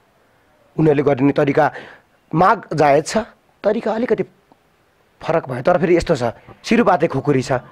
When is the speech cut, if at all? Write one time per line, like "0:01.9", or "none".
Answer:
0:06.6